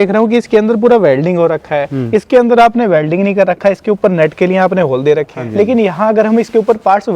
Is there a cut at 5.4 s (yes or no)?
yes